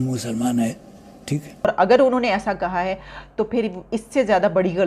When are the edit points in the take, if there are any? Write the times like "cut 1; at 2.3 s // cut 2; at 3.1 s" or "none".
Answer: cut 1; at 1.5 s